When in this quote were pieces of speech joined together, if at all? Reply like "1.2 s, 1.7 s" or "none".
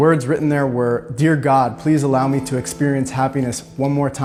none